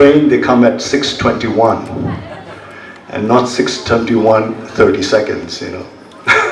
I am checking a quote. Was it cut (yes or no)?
no